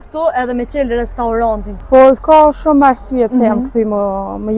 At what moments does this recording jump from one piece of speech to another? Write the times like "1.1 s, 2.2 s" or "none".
1.7 s